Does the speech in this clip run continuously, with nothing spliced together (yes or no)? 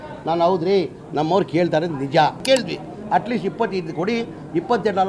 no